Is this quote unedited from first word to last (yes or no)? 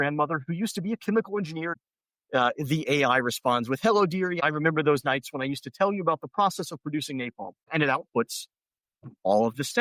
no